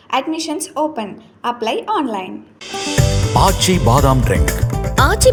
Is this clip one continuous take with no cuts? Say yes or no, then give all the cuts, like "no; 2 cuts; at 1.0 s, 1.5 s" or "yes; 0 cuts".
yes; 0 cuts